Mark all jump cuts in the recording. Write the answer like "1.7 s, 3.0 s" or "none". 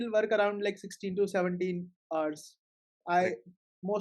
none